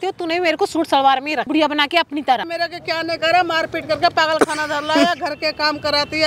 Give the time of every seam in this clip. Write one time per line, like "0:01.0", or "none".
0:01.5
0:02.5